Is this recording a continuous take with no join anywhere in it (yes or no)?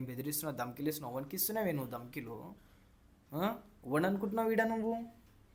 yes